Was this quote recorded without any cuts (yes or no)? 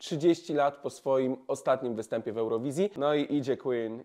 no